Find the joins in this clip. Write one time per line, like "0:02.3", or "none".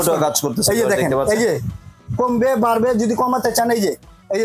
none

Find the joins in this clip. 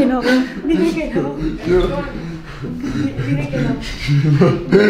none

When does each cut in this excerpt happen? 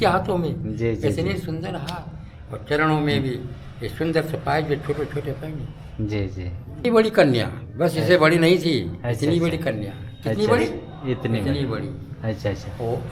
0:06.8

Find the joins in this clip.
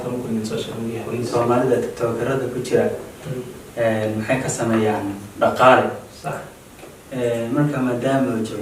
0:01.3

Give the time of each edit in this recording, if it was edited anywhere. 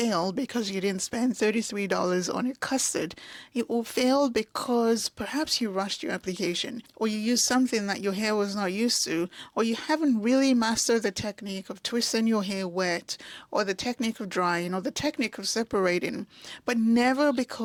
none

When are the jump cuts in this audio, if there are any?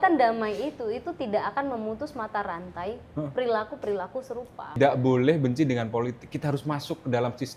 0:04.8

